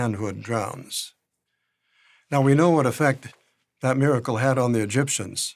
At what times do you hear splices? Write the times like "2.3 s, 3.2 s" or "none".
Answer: 1.6 s